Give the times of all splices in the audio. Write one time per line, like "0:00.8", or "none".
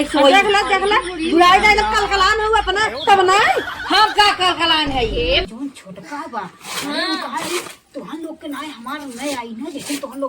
0:05.5

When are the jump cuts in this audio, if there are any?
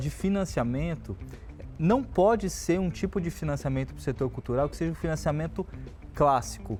none

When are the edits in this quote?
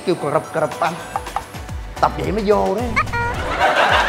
0:01.5

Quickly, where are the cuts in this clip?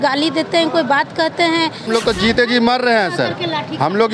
0:01.9

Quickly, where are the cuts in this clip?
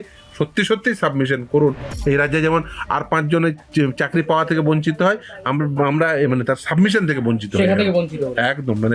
0:01.9

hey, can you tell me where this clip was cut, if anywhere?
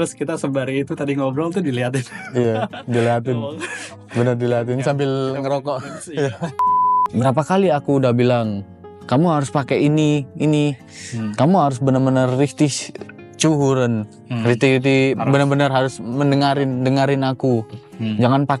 0:06.7

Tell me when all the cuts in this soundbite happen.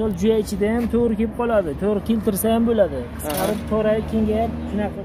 none

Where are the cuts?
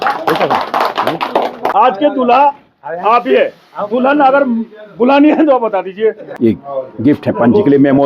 0:01.7
0:06.3

